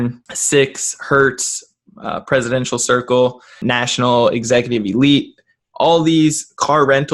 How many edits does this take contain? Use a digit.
0